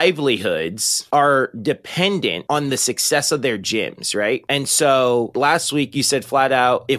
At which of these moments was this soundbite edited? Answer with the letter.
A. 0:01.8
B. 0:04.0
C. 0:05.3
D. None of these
C